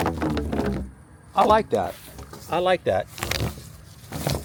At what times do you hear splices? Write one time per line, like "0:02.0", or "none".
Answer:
none